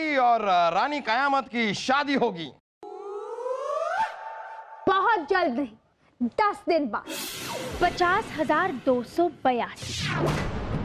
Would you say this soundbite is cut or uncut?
uncut